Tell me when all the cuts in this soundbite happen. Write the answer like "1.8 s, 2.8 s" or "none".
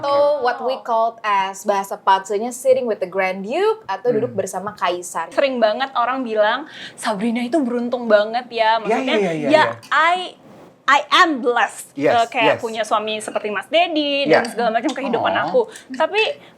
5.3 s